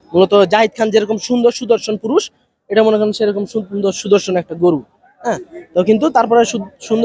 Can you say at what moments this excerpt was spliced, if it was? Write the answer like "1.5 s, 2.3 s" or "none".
none